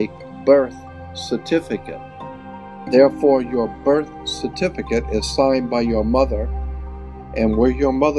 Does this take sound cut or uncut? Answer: cut